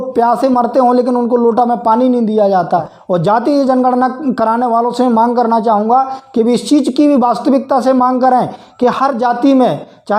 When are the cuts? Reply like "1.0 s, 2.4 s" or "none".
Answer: 2.9 s